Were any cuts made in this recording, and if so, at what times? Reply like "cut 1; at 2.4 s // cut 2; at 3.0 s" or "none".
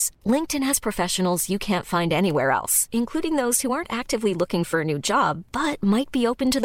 none